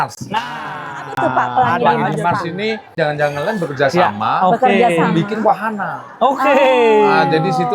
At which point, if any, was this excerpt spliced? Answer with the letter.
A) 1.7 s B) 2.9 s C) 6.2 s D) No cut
B